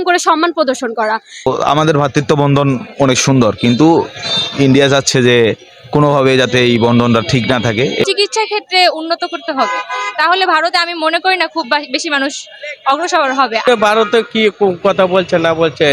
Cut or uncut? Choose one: cut